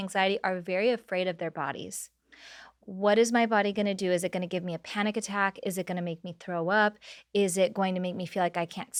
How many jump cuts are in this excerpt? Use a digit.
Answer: 0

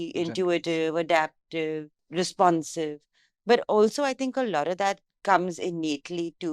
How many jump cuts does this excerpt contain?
1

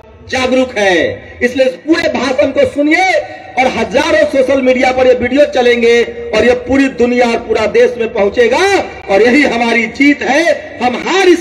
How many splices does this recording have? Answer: 0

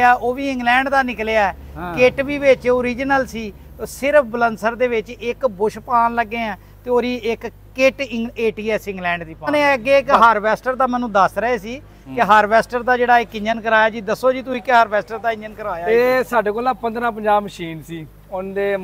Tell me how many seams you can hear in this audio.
2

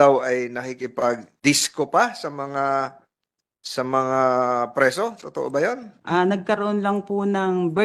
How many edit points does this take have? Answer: 2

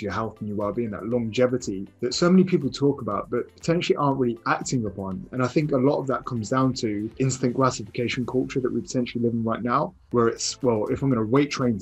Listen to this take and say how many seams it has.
4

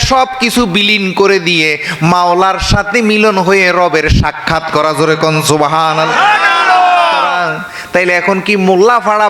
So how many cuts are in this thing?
1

